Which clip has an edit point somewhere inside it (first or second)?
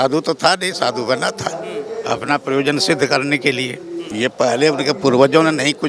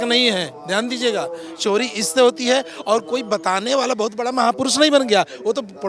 first